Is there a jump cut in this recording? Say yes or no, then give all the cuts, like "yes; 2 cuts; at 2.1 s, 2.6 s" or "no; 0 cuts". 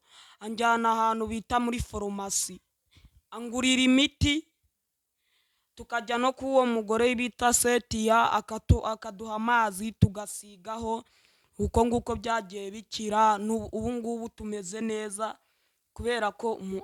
no; 0 cuts